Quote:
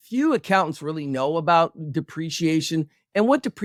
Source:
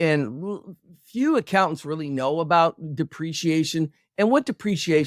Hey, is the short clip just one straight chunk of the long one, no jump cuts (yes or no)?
yes